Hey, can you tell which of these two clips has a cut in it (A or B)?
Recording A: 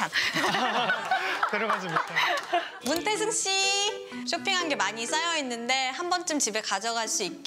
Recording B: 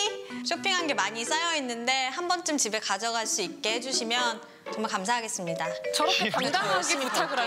A